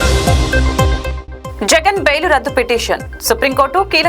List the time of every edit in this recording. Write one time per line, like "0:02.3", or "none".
0:01.2

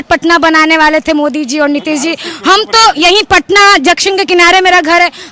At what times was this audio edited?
none

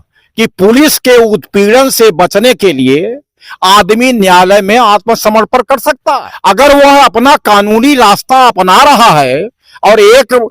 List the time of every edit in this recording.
0:06.3

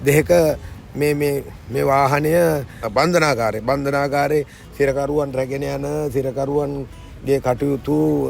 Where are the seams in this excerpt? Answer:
0:02.8

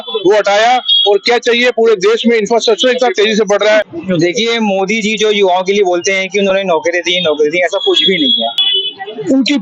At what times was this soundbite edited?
0:03.9
0:08.6

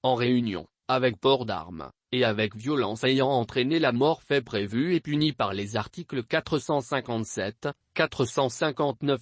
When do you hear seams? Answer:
0:03.9

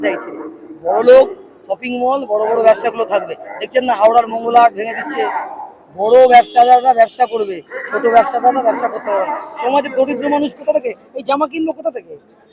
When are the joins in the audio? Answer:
none

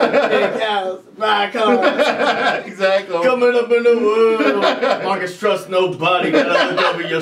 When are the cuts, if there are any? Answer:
none

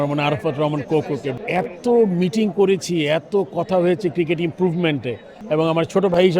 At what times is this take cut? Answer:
0:01.4
0:05.3

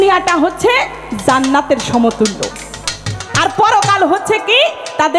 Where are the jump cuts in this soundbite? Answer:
none

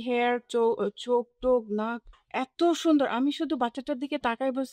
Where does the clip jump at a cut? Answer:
none

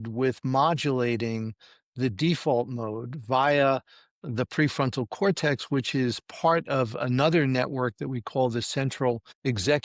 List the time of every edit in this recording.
none

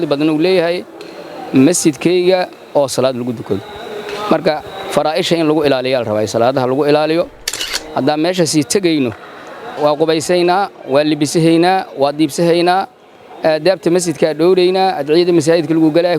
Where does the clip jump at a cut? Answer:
0:09.8

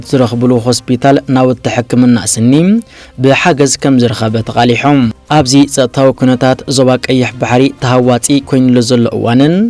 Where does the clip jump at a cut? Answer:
0:05.2

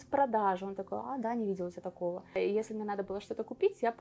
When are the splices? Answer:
0:02.4

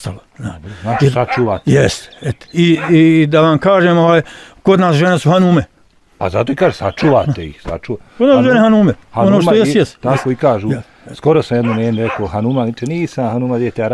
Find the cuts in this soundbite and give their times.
none

